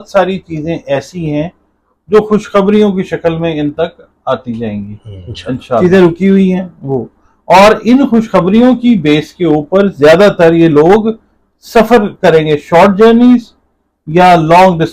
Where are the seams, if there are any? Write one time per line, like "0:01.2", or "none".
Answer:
0:05.8

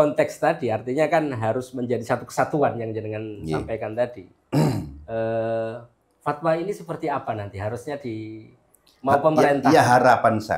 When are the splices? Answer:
none

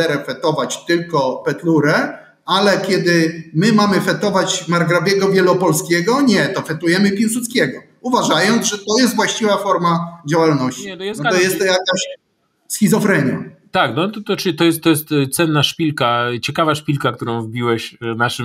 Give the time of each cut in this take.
none

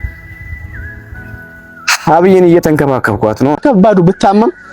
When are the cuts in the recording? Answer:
0:03.6

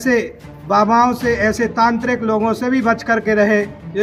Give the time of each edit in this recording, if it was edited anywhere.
none

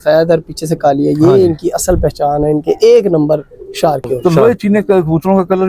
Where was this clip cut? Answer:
0:04.1

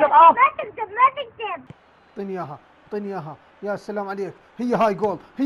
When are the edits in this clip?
0:01.6

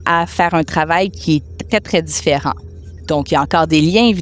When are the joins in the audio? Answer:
none

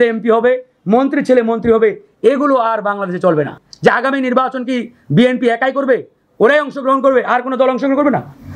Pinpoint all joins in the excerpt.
0:03.6

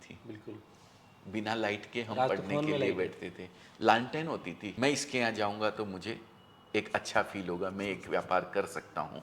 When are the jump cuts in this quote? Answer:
0:04.6

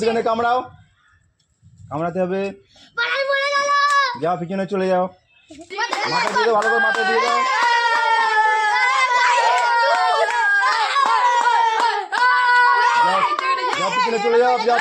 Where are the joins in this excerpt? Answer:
0:05.7

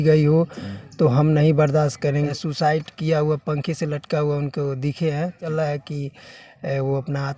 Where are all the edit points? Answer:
0:02.3
0:05.5

